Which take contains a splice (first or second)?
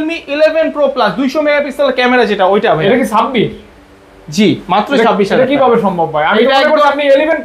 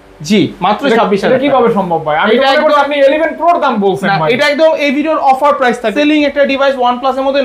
second